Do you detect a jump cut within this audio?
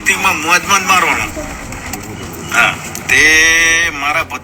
no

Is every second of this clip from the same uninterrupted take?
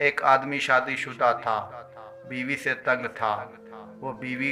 yes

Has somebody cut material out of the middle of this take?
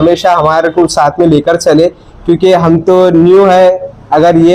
no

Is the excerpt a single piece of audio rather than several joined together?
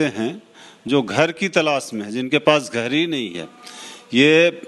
yes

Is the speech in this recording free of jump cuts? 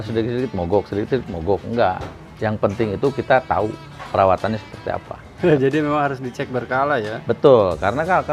no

